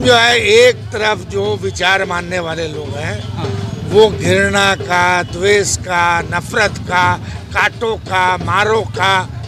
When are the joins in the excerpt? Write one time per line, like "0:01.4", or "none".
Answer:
none